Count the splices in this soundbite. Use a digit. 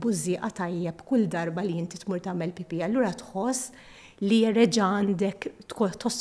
0